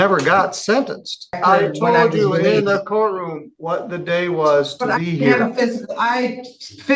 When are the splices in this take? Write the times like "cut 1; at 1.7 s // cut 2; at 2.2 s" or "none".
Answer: cut 1; at 1.4 s